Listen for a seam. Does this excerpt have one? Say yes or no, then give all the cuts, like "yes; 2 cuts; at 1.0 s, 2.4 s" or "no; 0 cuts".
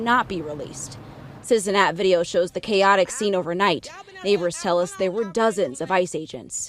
no; 0 cuts